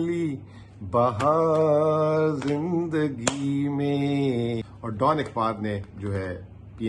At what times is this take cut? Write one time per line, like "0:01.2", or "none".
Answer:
0:04.7